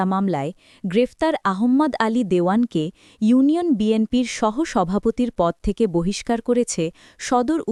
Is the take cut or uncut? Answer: uncut